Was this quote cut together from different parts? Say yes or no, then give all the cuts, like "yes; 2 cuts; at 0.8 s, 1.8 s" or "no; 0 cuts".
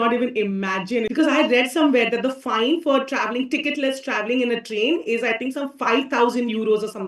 yes; 1 cut; at 1.1 s